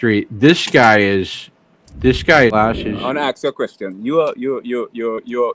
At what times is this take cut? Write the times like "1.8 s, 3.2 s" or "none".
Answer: 2.5 s

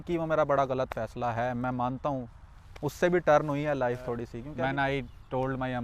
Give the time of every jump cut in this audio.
4.4 s

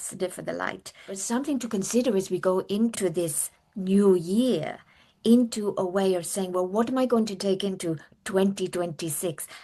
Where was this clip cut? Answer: 1.2 s, 3.0 s

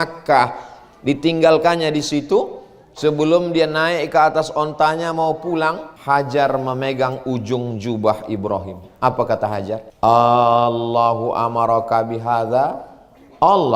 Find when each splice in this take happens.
5.9 s, 9.9 s

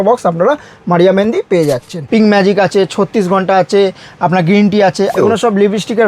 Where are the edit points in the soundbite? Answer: 1.9 s, 5.1 s

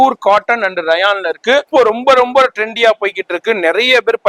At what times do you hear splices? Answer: 1.7 s

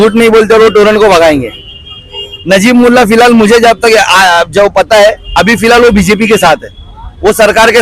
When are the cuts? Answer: none

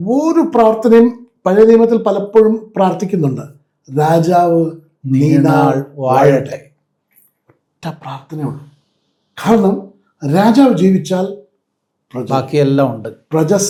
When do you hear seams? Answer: none

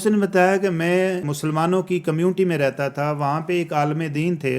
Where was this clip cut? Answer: 1.3 s

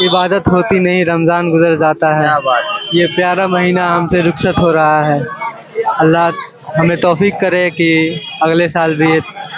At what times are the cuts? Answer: none

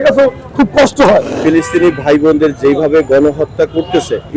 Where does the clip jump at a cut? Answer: 1.3 s

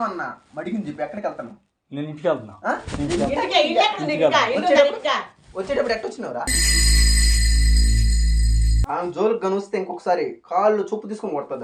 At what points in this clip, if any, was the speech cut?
none

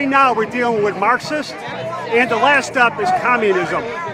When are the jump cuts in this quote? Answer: none

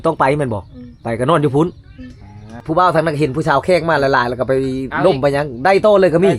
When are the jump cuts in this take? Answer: 2.6 s

